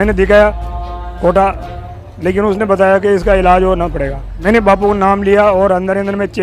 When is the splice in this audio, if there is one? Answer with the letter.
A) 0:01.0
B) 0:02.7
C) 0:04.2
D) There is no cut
C